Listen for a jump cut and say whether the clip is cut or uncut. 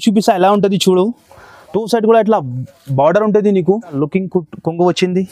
cut